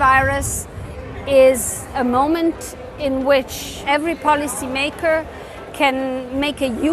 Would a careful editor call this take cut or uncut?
cut